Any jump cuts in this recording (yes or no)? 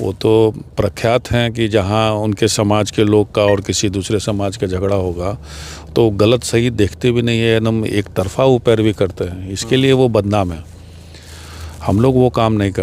no